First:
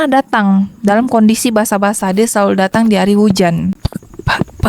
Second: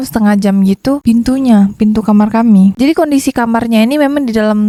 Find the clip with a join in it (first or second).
first